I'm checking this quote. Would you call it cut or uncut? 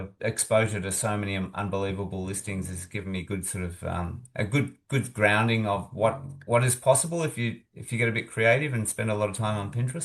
uncut